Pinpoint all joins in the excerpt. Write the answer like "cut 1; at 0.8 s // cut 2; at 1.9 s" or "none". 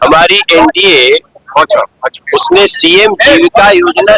none